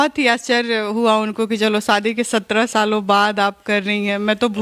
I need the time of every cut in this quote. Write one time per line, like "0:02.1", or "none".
none